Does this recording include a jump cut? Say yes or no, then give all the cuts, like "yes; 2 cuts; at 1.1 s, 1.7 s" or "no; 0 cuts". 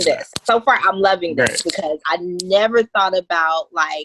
yes; 1 cut; at 2.0 s